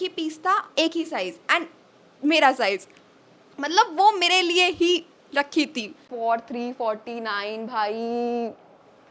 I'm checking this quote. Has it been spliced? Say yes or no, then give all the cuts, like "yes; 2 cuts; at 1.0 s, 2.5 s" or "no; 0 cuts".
yes; 1 cut; at 6.0 s